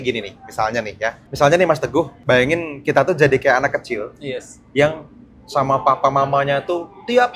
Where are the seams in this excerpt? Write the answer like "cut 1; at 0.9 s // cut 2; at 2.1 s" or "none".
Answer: cut 1; at 1.2 s // cut 2; at 2.2 s